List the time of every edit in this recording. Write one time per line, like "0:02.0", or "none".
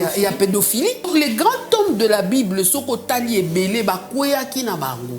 0:01.1